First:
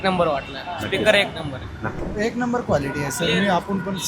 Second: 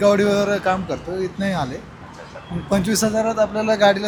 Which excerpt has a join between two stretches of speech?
first; 1 cut; at 1.9 s

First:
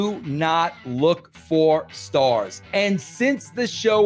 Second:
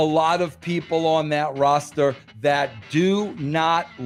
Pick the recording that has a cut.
first; 1 cut; at 2.6 s

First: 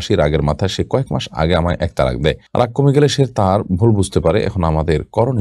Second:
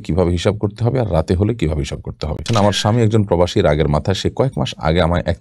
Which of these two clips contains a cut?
second; 1 cut; at 2.5 s

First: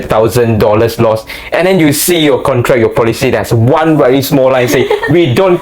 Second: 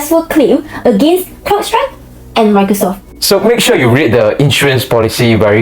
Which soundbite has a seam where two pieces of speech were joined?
second; 1 cut; at 3.1 s

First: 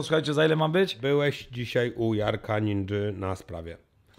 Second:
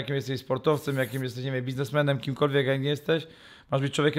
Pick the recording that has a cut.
first; 1 cut; at 1.0 s

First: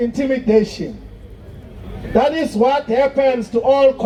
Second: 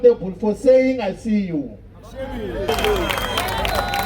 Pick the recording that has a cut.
second; 1 cut; at 2.7 s

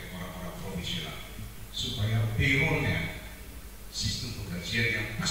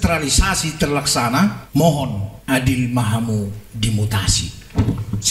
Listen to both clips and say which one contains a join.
second; 2 cuts; at 1.6 s, 2.3 s

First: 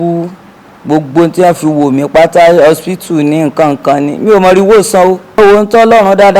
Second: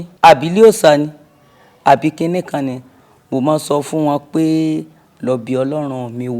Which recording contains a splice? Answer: first; 1 cut; at 5.4 s

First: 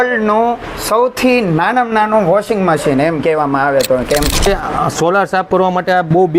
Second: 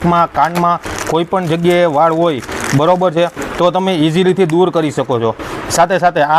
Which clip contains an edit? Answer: first; 1 cut; at 4.5 s

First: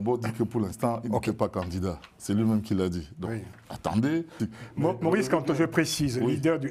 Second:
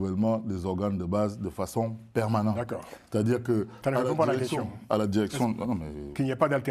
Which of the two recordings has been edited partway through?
first; 1 cut; at 4.5 s

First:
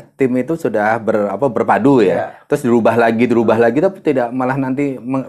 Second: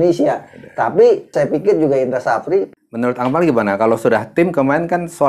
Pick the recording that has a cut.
second; 2 cuts; at 1.3 s, 2.7 s

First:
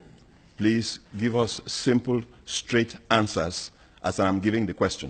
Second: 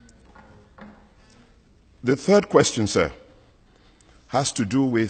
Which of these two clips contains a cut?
first; 1 cut; at 4.0 s

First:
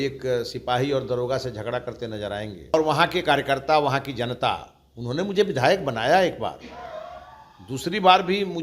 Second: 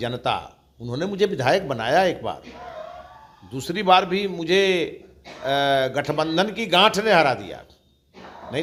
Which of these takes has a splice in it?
first; 1 cut; at 2.7 s

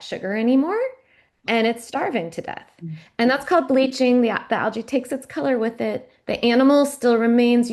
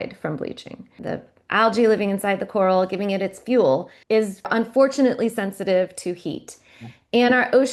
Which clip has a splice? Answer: second; 2 cuts; at 1.0 s, 4.4 s

